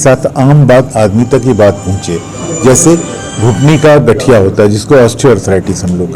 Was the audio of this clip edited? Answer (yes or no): no